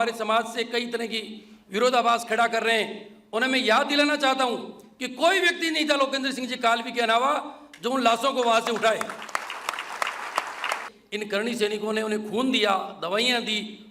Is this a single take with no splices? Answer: no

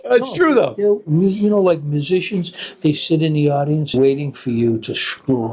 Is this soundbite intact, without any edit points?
no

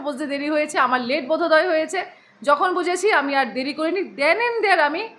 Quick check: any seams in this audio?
no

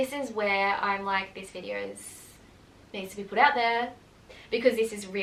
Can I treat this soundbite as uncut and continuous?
yes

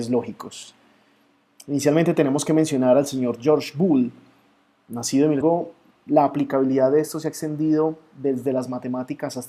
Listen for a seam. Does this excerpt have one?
no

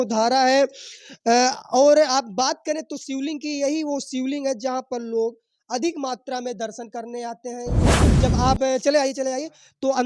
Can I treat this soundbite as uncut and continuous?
no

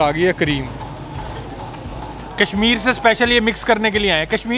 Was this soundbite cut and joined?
yes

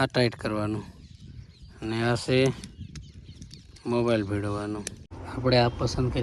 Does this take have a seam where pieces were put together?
yes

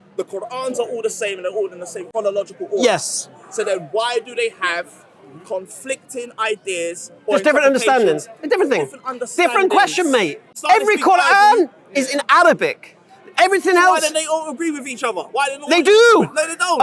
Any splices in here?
yes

